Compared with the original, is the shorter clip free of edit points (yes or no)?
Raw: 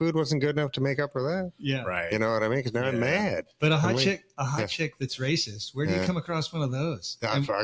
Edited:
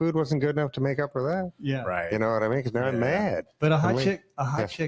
yes